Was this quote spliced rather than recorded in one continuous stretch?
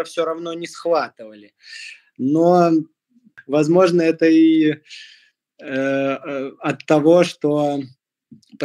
no; 0 cuts

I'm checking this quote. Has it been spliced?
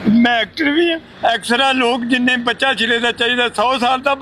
no; 0 cuts

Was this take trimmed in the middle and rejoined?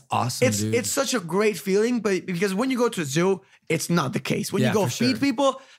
no; 0 cuts

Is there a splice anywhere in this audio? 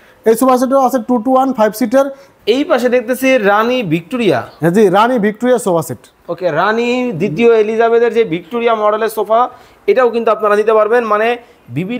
yes; 1 cut; at 2.2 s

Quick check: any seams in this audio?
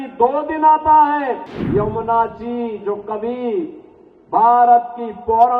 yes; 1 cut; at 1.5 s

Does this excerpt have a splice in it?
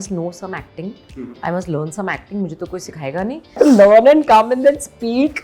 yes; 1 cut; at 3.6 s

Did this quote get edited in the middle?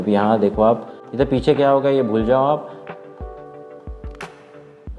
no; 0 cuts

